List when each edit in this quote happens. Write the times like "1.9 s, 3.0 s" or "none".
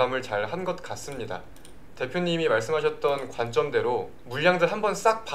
4.2 s